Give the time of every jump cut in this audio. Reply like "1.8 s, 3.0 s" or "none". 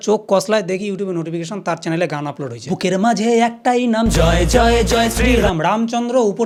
none

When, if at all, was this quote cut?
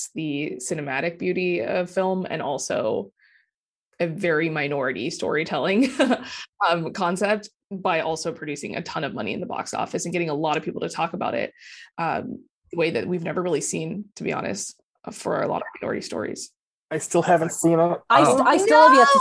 17.1 s

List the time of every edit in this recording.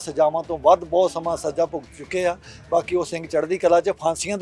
none

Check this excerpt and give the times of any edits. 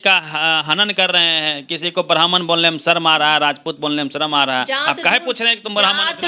none

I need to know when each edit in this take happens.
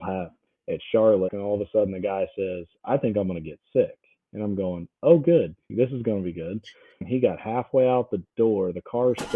1.4 s, 5.7 s, 7.0 s

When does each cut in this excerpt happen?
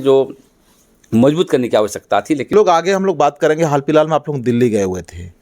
2.5 s

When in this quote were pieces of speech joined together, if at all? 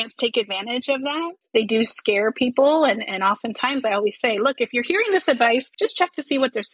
1.4 s, 5.7 s

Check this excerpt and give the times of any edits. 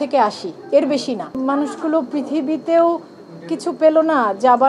1.3 s

